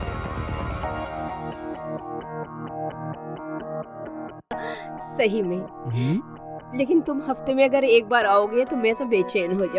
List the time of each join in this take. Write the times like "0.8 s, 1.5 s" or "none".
none